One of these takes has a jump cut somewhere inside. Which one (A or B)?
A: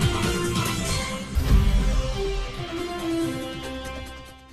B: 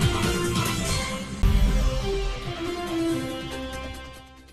B